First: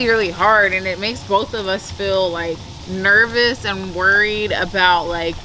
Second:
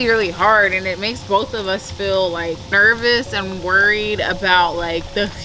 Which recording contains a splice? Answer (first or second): second